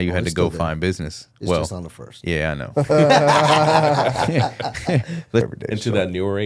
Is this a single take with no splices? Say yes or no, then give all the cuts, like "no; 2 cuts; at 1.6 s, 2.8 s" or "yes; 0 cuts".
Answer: no; 1 cut; at 5.5 s